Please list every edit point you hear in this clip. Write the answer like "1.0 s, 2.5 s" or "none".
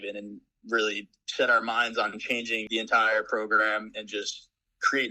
2.6 s